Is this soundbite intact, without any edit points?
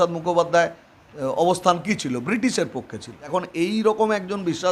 no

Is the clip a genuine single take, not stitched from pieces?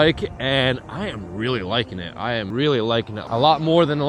no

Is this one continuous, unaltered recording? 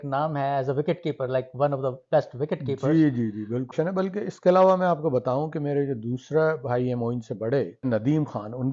no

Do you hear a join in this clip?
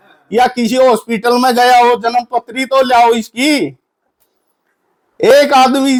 no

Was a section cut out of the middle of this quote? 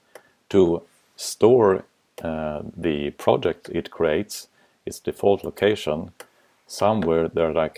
no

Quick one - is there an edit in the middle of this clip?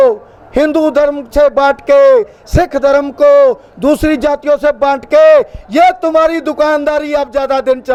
no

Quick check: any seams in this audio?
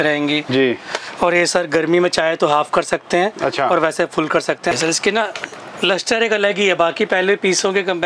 yes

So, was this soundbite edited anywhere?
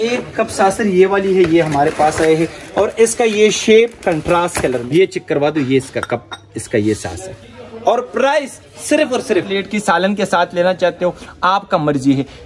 yes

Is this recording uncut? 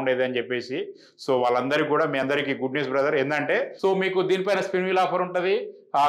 no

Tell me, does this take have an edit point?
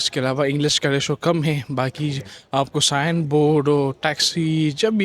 no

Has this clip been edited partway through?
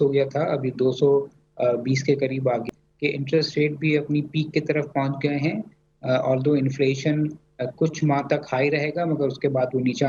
yes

